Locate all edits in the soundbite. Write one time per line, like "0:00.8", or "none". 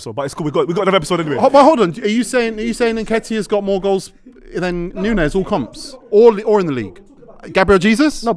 0:01.0